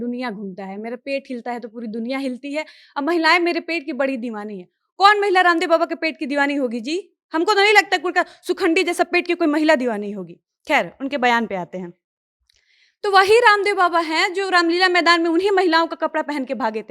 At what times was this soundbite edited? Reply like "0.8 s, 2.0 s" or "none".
none